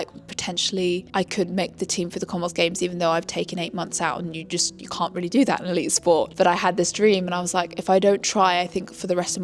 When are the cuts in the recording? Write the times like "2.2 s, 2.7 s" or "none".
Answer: none